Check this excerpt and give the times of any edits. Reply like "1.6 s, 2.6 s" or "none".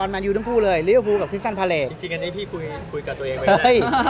none